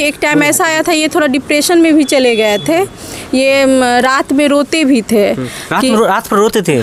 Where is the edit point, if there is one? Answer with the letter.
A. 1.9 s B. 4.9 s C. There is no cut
C